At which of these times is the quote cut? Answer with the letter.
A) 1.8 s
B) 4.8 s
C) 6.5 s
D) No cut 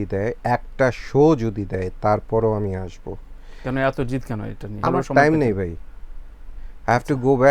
B